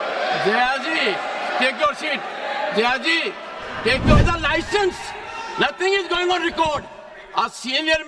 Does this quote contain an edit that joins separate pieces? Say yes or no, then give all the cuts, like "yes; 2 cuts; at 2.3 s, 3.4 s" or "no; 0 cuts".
yes; 1 cut; at 4.2 s